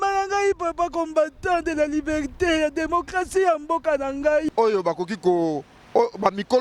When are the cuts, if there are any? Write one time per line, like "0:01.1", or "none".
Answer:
0:04.5